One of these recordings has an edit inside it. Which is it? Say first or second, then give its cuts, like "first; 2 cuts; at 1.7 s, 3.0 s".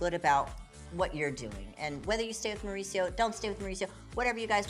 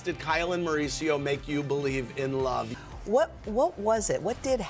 second; 1 cut; at 2.7 s